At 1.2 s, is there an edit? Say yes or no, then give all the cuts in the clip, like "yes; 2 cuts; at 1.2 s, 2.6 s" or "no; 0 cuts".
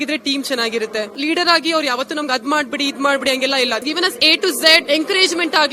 yes; 3 cuts; at 1.2 s, 3.8 s, 4.8 s